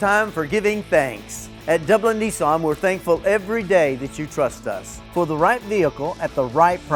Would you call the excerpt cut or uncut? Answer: uncut